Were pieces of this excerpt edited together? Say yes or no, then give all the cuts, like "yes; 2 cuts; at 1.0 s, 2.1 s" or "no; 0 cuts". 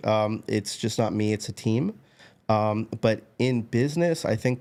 no; 0 cuts